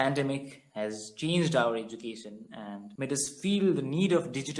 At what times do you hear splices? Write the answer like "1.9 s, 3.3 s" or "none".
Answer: none